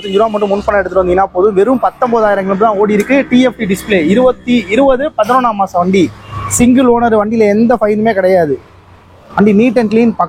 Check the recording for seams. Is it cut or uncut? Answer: uncut